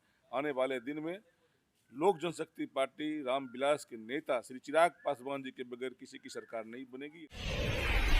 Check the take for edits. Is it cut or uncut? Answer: cut